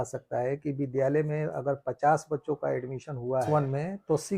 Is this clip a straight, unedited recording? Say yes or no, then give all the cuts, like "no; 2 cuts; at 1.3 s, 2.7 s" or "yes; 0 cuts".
no; 1 cut; at 3.5 s